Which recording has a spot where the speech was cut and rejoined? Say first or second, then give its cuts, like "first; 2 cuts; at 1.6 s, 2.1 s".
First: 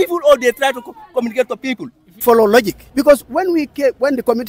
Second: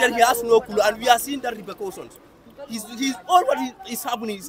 first; 2 cuts; at 2.1 s, 2.8 s